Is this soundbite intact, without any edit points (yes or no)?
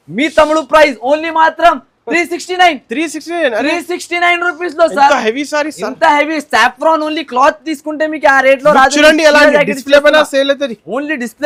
yes